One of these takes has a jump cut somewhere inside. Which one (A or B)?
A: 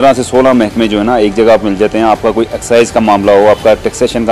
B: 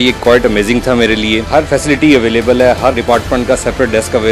B